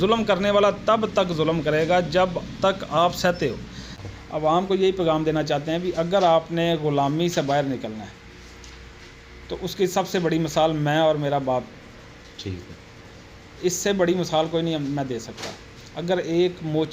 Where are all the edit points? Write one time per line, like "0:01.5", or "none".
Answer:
0:04.0